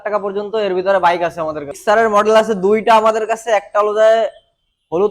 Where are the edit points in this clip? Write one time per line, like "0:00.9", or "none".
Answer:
0:01.7